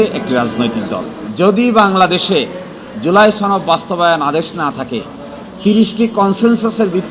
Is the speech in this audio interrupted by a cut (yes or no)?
yes